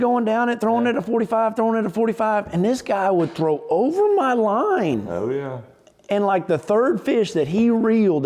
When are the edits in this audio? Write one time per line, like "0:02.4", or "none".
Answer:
none